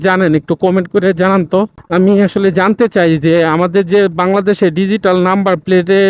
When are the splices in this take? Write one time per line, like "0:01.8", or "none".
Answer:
none